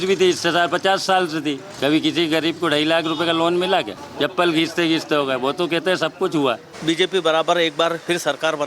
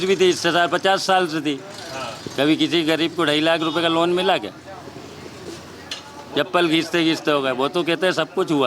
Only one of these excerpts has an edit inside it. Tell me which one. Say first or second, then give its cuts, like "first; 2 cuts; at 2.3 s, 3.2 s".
first; 3 cuts; at 1.7 s, 4.0 s, 6.7 s